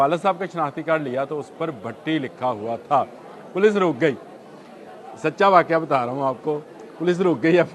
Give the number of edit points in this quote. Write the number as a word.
zero